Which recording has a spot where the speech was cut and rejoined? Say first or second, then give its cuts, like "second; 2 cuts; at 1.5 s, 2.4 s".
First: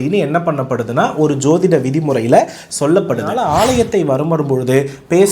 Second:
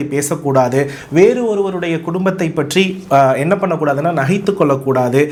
first; 1 cut; at 3.3 s